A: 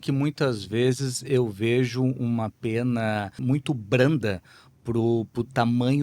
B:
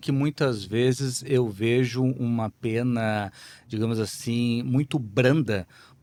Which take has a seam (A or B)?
A